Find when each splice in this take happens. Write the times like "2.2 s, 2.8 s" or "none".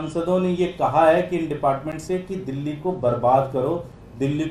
none